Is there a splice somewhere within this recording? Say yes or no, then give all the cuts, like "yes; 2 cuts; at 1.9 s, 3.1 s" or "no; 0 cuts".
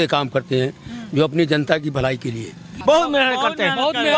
yes; 1 cut; at 2.7 s